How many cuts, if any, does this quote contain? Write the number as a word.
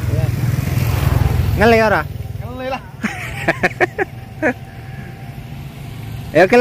zero